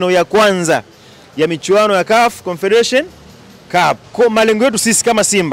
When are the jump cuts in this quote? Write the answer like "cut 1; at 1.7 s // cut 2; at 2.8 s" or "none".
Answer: cut 1; at 4.0 s